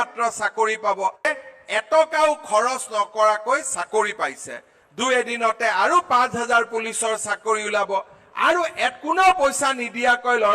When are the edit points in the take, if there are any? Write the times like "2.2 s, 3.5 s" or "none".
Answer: 1.2 s